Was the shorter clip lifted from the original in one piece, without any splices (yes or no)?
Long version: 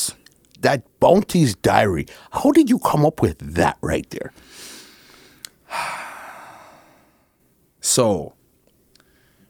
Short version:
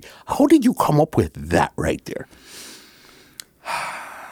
yes